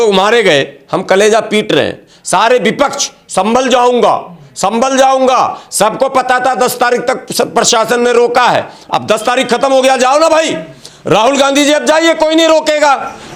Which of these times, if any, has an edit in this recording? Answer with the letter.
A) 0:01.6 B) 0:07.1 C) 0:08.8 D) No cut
D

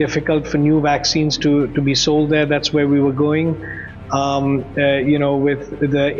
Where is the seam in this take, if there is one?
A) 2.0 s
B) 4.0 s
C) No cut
C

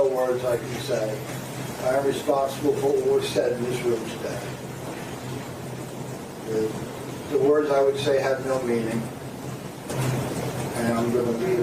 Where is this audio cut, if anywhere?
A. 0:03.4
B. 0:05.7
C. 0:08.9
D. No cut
D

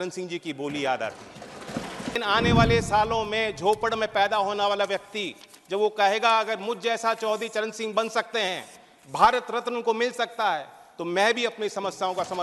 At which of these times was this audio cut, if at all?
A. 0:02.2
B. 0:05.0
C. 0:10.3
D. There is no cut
A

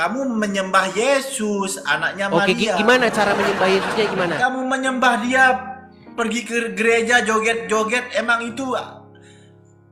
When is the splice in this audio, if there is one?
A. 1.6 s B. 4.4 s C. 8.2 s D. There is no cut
B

